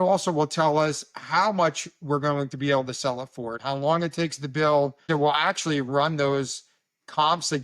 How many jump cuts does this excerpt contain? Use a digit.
2